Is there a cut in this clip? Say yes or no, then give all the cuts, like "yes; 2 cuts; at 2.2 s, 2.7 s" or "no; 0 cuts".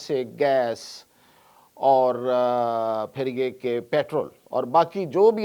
yes; 1 cut; at 4.4 s